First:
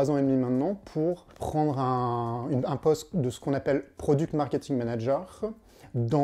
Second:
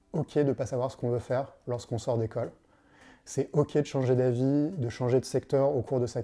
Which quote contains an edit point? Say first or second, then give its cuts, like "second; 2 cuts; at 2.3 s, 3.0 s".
first; 1 cut; at 1.3 s